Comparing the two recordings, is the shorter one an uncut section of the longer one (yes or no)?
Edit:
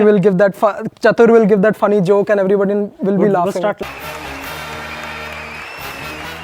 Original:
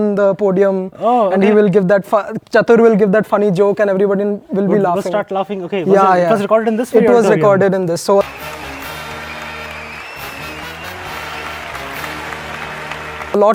no